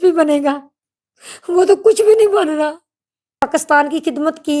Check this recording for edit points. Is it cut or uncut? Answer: cut